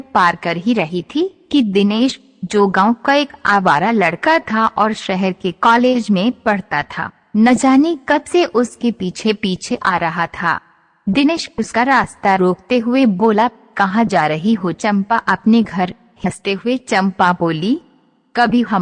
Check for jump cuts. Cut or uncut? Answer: cut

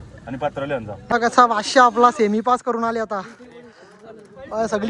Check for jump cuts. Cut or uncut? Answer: cut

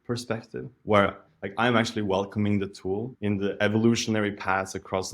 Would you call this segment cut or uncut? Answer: cut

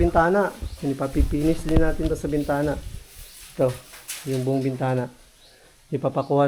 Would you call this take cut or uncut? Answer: uncut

